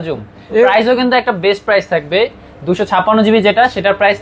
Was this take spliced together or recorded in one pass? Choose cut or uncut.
uncut